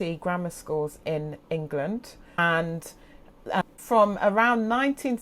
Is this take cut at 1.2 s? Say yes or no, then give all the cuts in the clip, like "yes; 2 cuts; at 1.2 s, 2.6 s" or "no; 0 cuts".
no; 2 cuts; at 2.4 s, 3.8 s